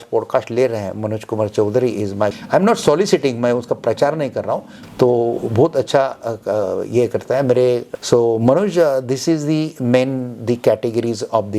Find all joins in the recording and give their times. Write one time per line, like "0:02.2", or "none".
0:02.4
0:04.8
0:07.9